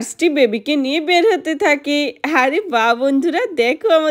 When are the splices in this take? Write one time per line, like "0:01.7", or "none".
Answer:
none